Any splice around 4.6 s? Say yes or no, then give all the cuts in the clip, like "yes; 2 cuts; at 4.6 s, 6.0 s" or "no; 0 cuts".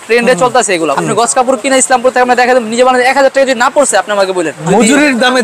yes; 2 cuts; at 1.0 s, 4.6 s